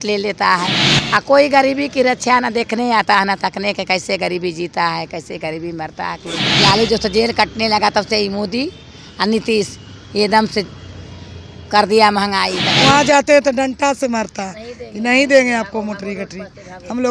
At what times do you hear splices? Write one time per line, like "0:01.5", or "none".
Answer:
0:06.4
0:12.6